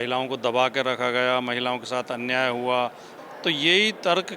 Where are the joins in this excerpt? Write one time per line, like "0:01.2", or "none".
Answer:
0:03.1